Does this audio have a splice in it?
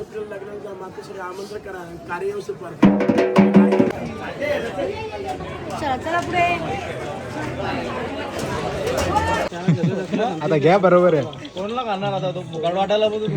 yes; 2 cuts; at 3.9 s, 9.5 s

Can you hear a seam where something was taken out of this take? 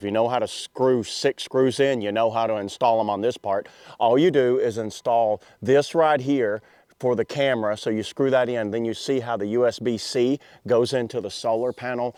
no; 0 cuts

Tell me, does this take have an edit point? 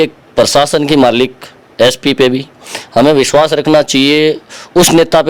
no; 0 cuts

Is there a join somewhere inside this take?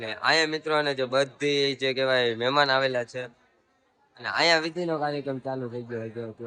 no; 0 cuts

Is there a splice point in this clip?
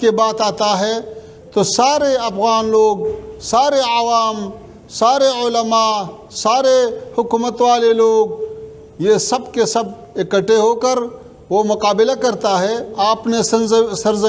no; 0 cuts

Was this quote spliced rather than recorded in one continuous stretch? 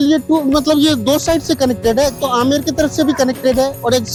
no; 0 cuts

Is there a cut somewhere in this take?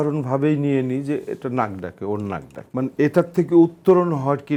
no; 0 cuts

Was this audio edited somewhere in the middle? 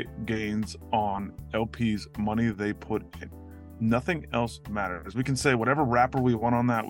no; 0 cuts

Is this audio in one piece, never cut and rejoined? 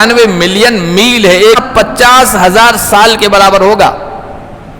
no; 1 cut; at 1.6 s

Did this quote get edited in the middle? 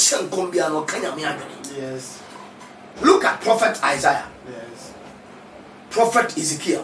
no; 0 cuts

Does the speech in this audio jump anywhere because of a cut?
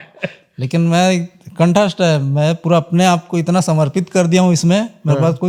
no; 0 cuts

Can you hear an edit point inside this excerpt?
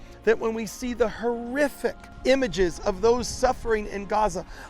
yes; 1 cut; at 2.1 s

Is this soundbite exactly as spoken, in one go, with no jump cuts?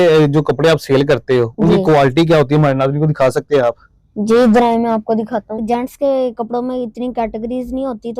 no; 1 cut; at 5.6 s

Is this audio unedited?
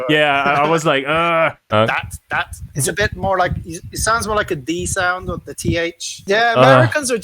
no; 1 cut; at 1.7 s

